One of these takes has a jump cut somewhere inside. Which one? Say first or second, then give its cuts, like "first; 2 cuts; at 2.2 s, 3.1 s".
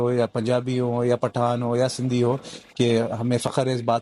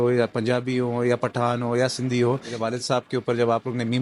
second; 1 cut; at 2.6 s